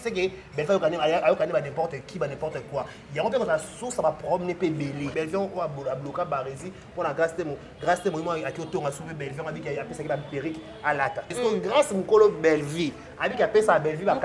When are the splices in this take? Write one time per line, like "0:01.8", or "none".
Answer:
0:05.1
0:11.3